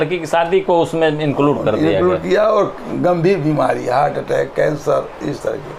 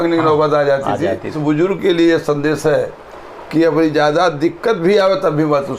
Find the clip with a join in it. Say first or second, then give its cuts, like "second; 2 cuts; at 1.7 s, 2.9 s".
second; 1 cut; at 1.4 s